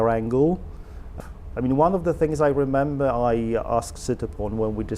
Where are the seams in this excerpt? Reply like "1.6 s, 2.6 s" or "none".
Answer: 1.1 s

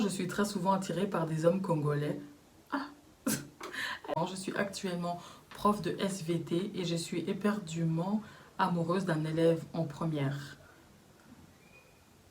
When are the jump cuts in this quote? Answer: 4.1 s

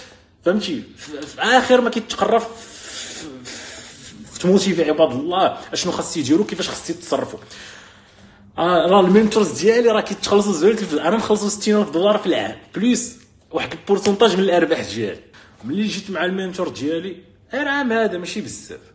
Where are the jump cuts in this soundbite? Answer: 15.3 s

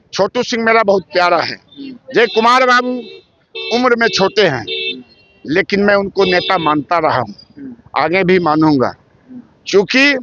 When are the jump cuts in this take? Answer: none

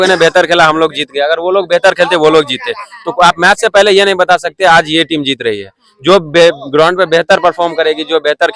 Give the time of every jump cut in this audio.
none

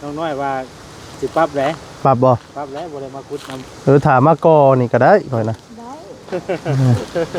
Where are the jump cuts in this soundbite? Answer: none

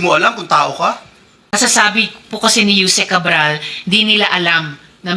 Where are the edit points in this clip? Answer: 1.4 s

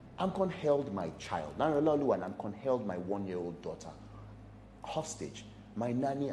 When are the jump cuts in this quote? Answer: none

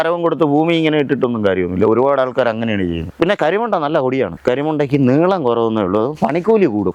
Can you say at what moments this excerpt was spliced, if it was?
3.1 s

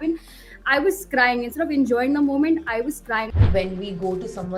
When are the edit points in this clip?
3.4 s

